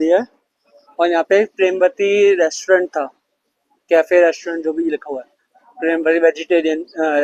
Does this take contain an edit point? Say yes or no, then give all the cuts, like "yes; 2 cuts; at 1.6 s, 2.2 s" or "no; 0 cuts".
no; 0 cuts